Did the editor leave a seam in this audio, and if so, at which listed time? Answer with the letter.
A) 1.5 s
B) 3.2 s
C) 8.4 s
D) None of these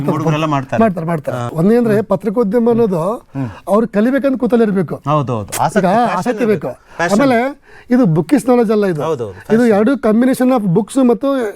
A